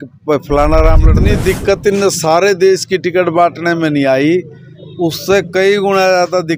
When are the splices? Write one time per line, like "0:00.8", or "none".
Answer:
0:01.2